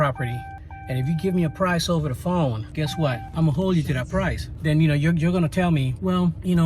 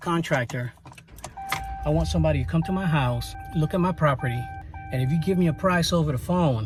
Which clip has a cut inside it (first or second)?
first